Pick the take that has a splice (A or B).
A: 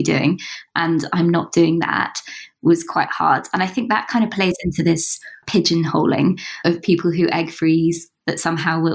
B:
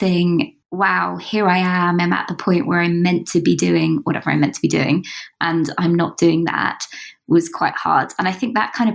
A